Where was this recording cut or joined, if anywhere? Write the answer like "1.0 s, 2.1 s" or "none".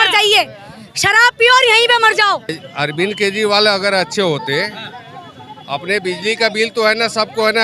2.6 s